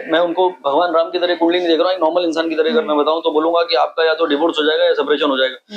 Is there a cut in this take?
no; 0 cuts

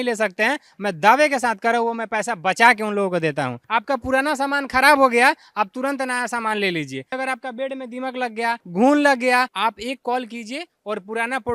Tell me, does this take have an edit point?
yes; 4 cuts; at 3.6 s, 7.2 s, 8.6 s, 9.5 s

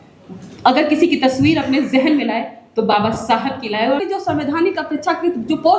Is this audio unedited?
no; 1 cut; at 4.0 s

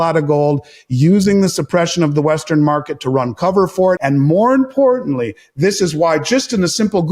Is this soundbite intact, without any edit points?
no; 1 cut; at 4.0 s

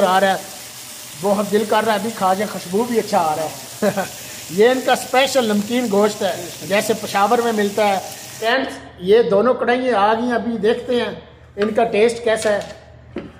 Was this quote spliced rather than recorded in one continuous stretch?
yes; 1 cut; at 8.4 s

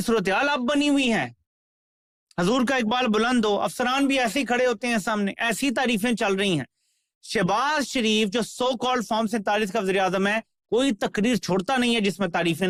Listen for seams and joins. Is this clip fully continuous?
yes; 0 cuts

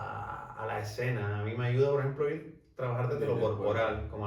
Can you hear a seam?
no; 0 cuts

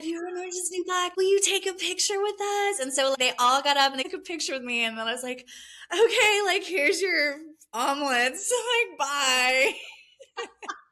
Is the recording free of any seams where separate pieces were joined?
yes; 0 cuts

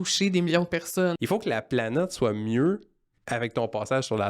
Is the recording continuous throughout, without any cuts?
no; 1 cut; at 1.2 s

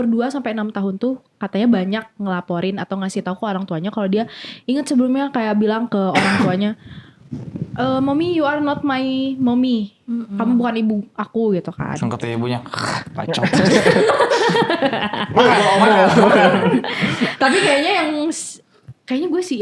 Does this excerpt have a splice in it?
no; 0 cuts

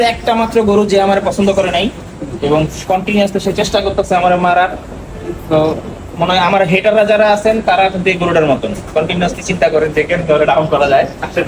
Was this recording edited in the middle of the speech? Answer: no; 0 cuts

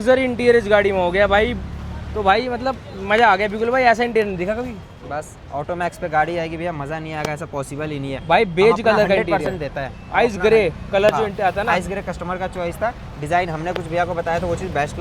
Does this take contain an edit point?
no; 0 cuts

